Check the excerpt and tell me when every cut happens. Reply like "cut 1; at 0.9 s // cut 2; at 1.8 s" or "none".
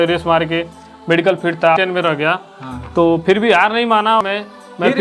cut 1; at 1.8 s // cut 2; at 4.2 s